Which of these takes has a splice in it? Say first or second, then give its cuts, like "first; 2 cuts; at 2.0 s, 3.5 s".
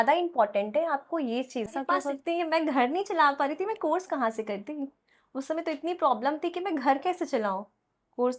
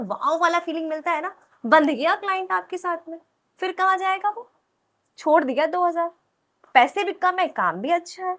first; 1 cut; at 1.7 s